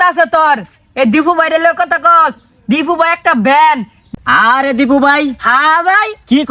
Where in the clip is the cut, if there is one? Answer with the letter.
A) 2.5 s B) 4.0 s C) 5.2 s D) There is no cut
B